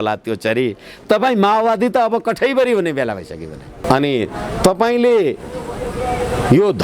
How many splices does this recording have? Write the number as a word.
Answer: one